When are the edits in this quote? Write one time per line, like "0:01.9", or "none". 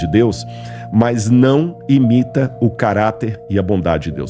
none

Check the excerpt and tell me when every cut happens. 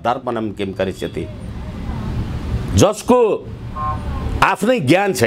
none

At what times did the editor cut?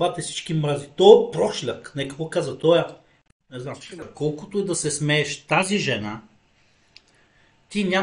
0:04.1

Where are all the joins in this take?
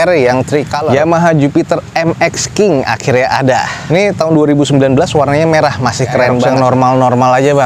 0:00.9
0:06.5

